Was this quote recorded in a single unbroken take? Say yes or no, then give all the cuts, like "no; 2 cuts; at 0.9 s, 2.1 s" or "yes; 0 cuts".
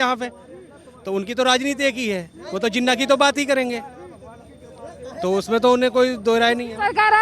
yes; 0 cuts